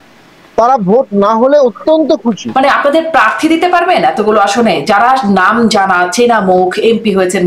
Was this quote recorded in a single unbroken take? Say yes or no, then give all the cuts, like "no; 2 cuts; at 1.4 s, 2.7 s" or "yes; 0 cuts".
no; 1 cut; at 2.4 s